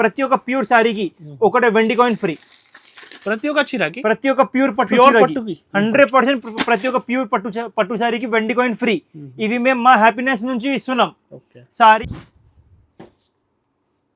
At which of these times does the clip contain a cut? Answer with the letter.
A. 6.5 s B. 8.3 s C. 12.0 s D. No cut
C